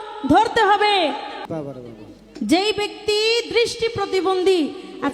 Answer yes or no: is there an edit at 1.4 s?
yes